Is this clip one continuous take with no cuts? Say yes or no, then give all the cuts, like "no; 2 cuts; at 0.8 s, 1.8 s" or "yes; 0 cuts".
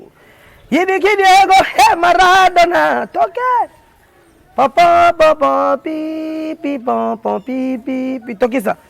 yes; 0 cuts